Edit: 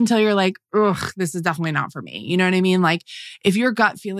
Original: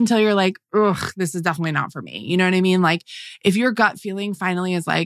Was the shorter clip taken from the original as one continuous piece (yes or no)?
yes